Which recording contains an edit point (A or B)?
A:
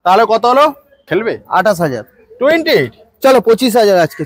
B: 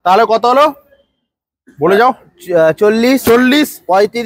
A